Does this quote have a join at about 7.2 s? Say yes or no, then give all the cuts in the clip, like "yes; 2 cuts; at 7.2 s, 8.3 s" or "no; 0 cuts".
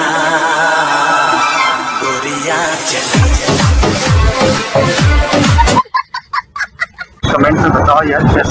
yes; 1 cut; at 7.2 s